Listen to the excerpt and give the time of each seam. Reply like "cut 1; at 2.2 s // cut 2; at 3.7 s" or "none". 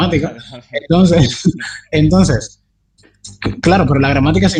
none